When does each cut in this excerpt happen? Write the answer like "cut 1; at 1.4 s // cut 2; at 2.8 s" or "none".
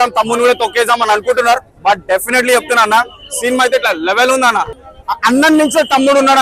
cut 1; at 4.9 s